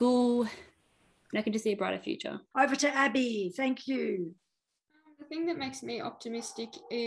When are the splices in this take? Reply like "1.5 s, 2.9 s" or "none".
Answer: 2.4 s